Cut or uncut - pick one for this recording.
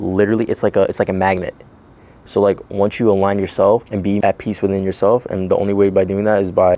cut